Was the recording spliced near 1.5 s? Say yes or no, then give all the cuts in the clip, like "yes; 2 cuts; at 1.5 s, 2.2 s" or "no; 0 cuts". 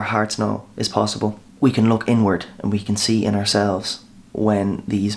yes; 1 cut; at 1.5 s